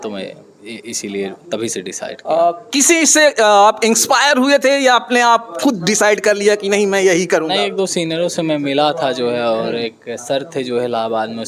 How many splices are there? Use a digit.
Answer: 0